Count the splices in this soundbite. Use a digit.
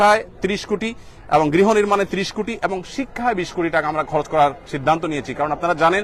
0